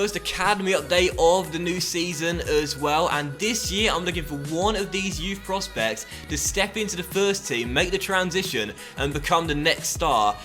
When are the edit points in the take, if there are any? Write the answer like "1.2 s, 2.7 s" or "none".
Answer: none